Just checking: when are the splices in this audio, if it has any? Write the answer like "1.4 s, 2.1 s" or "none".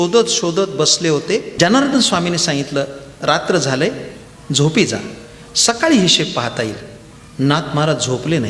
1.5 s